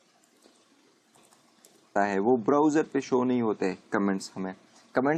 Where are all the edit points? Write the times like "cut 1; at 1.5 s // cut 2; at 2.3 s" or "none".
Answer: none